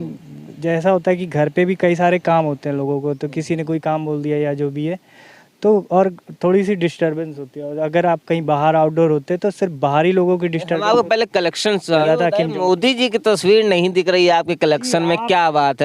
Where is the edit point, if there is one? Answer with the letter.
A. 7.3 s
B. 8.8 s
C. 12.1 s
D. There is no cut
C